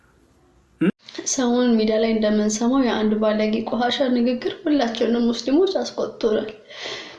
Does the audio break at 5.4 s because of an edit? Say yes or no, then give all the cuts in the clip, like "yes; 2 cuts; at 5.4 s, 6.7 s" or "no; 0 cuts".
no; 1 cut; at 0.9 s